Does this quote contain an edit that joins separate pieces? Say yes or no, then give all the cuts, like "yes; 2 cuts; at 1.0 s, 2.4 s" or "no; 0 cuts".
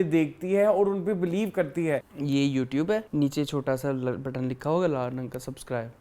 yes; 2 cuts; at 2.1 s, 3.1 s